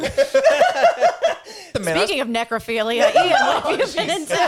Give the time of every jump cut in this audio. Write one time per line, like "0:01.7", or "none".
0:01.7

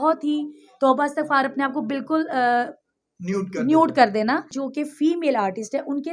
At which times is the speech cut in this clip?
0:04.6

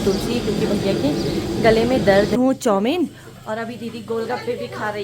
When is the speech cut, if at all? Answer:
0:02.4

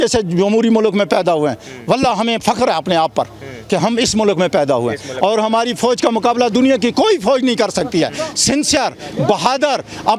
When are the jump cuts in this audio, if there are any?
none

